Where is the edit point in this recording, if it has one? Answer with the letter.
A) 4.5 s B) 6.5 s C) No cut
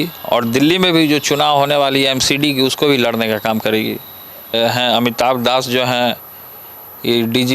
A